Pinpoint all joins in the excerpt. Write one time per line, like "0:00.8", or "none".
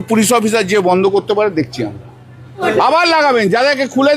0:02.6